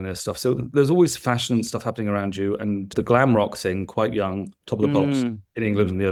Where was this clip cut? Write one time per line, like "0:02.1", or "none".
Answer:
none

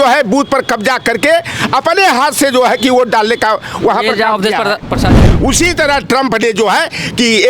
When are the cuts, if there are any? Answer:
0:05.1

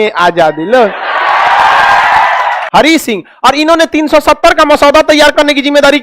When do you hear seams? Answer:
0:02.6

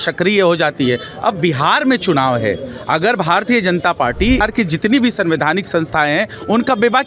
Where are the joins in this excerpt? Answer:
0:04.4

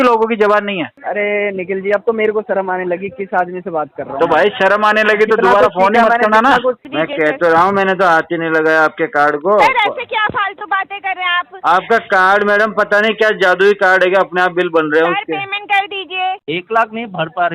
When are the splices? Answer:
0:01.0
0:06.9
0:16.4

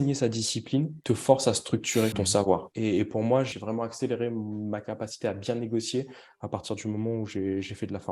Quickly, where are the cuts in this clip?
0:01.0
0:02.5
0:03.5

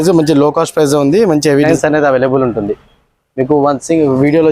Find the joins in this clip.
0:01.7

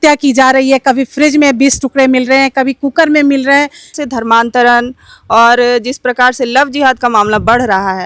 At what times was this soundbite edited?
0:03.9

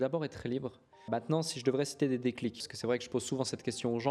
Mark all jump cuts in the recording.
0:01.1
0:02.6

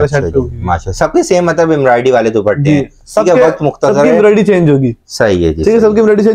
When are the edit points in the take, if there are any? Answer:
none

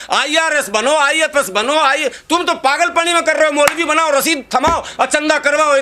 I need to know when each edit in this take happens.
none

